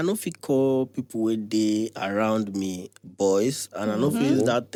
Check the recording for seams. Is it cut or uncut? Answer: uncut